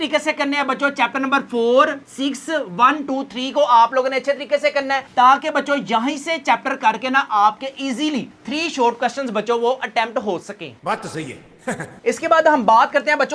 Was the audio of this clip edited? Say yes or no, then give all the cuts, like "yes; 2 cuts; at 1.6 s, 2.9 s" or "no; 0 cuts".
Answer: no; 0 cuts